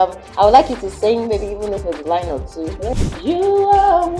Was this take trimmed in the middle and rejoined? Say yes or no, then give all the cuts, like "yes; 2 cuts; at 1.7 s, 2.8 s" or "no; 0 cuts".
yes; 1 cut; at 2.9 s